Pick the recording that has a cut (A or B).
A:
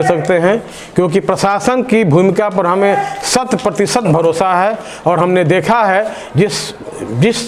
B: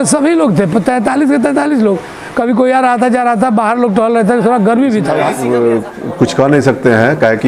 B